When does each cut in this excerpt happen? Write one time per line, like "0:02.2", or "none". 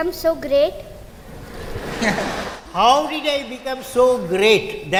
none